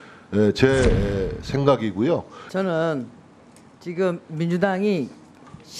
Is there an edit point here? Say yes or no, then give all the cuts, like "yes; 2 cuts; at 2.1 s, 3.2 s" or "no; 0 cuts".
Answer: yes; 1 cut; at 2.4 s